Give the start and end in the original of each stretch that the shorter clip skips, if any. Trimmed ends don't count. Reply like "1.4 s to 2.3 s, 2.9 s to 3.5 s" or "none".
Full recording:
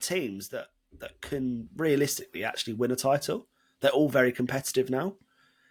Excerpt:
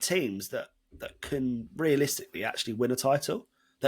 none